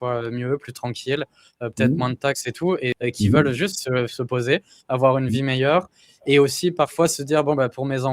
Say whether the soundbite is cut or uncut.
cut